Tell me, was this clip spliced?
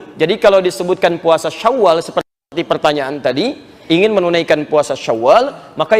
yes; 1 cut; at 2.4 s

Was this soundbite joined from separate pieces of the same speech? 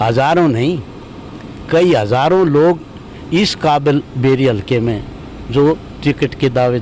no; 0 cuts

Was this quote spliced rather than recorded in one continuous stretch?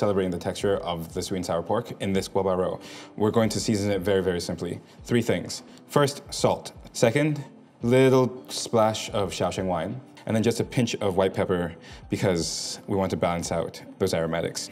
yes; 3 cuts; at 6.7 s, 10.1 s, 13.8 s

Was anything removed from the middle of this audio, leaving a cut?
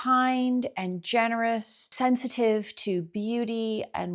yes; 1 cut; at 1.9 s

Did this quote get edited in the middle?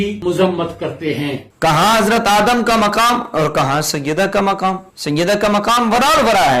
yes; 1 cut; at 1.4 s

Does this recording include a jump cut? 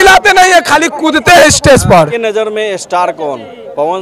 yes; 1 cut; at 2.1 s

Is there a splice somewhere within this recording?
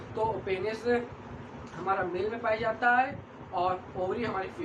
no; 0 cuts

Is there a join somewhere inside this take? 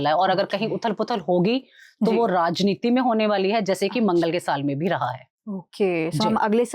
no; 0 cuts

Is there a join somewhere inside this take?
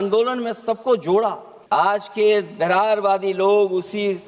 yes; 1 cut; at 1.5 s

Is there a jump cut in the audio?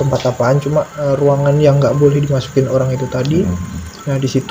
yes; 1 cut; at 0.9 s

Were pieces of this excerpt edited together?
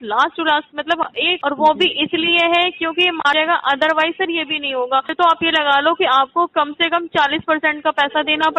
yes; 3 cuts; at 1.4 s, 3.3 s, 5.1 s

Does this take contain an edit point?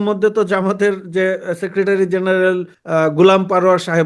yes; 1 cut; at 2.7 s

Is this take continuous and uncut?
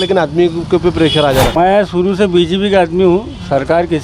no; 1 cut; at 1.6 s

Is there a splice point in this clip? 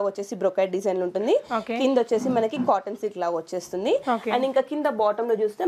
no; 0 cuts

